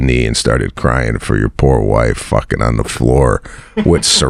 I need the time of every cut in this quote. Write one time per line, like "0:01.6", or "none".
none